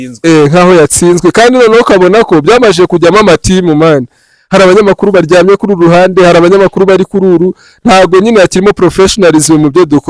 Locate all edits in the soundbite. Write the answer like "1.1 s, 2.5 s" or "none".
none